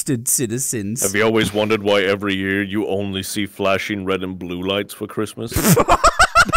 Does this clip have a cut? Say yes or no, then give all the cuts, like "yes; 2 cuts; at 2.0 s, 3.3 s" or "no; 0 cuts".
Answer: yes; 1 cut; at 1.0 s